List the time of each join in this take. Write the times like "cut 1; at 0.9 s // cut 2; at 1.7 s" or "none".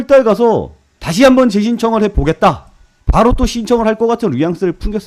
cut 1; at 2.9 s